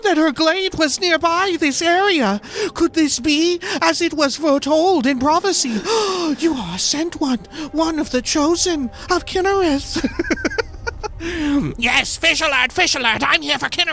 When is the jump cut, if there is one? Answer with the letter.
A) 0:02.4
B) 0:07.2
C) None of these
C